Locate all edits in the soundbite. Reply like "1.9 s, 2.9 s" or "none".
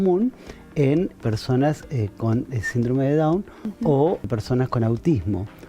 1.2 s, 4.2 s